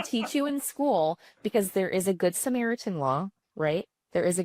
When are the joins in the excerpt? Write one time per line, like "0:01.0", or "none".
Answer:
none